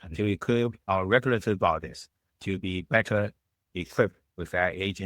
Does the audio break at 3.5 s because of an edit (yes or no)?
yes